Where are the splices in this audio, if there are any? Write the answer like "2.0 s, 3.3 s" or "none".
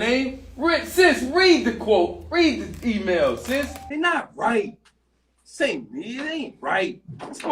3.8 s